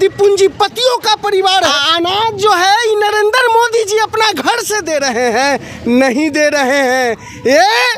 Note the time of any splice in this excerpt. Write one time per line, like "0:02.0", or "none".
0:01.7